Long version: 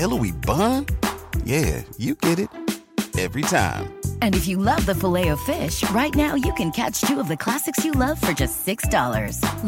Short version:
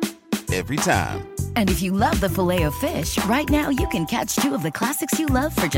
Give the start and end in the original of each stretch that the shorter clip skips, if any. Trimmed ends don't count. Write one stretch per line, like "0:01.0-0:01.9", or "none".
none